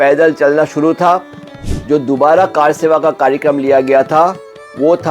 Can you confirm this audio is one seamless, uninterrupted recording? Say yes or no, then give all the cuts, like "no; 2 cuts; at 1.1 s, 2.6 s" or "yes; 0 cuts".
no; 1 cut; at 1.5 s